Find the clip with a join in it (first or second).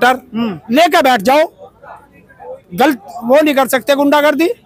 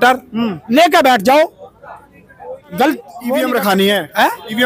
second